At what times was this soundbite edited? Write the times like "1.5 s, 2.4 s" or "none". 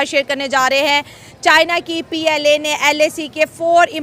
none